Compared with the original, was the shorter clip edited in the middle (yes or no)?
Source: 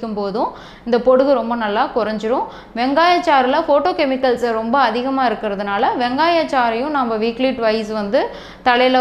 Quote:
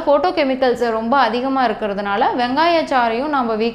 no